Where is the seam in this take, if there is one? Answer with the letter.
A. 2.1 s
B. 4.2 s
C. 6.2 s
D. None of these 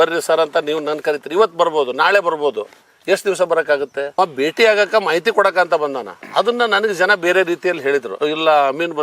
B